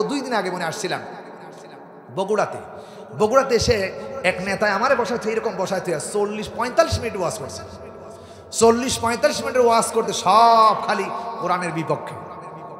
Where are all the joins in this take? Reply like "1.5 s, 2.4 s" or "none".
none